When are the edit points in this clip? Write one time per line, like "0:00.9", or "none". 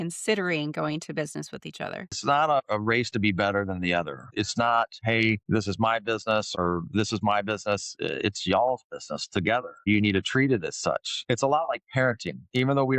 0:02.1
0:11.2